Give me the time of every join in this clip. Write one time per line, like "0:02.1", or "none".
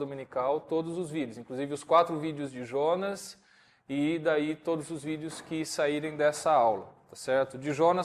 0:01.8